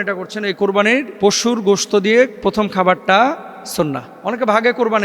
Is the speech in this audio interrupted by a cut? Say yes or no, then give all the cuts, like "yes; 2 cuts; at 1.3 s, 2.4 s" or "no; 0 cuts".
yes; 2 cuts; at 1.1 s, 4.1 s